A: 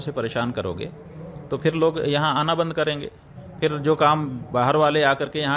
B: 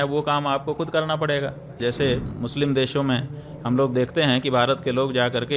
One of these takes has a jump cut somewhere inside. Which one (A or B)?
B